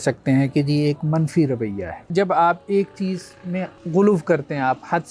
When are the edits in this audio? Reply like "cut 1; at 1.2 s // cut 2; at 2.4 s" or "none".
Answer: cut 1; at 2.1 s // cut 2; at 3.8 s